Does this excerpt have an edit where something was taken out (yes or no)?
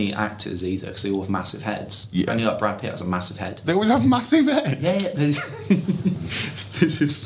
no